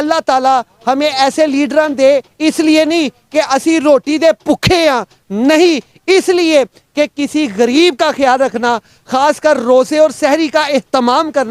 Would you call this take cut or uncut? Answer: uncut